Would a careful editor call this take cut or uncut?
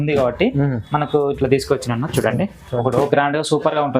cut